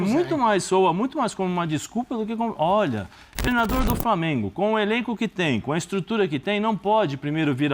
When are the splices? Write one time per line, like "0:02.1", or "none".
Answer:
0:03.3